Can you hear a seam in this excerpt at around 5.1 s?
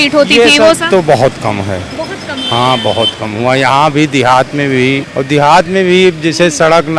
yes; 1 cut; at 5.1 s

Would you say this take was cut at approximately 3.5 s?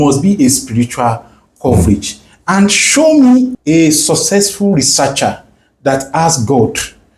yes; 1 cut; at 3.5 s

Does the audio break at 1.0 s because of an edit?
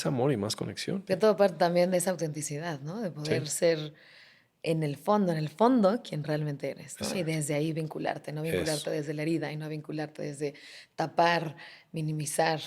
yes; 1 cut; at 1.0 s

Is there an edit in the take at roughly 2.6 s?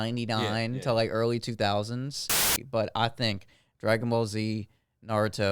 yes; 1 cut; at 2.6 s

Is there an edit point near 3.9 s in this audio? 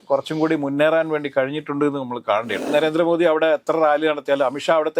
no; 1 cut; at 2.7 s

